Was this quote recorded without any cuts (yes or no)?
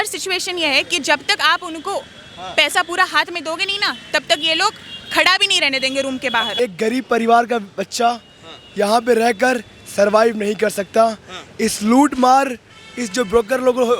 no